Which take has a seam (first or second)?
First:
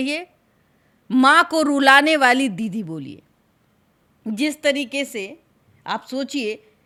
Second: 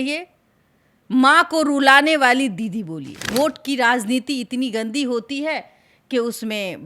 second